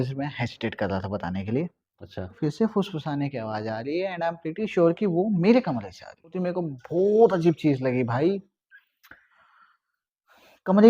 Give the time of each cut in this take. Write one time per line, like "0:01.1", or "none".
0:02.4
0:06.3